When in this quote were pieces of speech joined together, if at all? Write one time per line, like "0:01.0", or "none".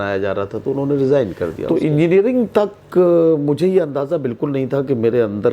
0:01.6